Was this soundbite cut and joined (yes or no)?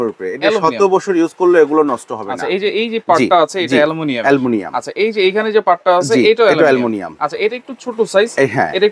no